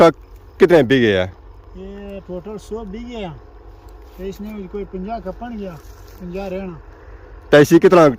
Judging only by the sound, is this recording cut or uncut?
uncut